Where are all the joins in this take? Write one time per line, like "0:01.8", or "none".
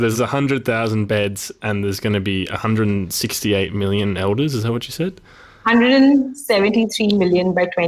0:01.1